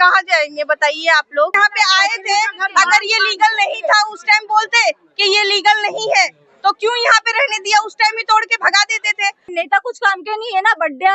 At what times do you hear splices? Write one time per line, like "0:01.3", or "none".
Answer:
0:01.5
0:09.5